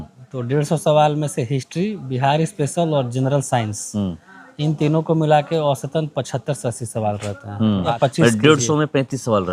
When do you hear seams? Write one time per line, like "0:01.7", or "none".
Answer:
0:07.9